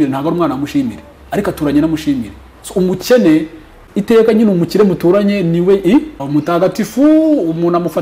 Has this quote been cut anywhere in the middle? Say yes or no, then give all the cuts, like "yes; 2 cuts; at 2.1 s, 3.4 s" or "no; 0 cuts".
yes; 2 cuts; at 3.8 s, 6.2 s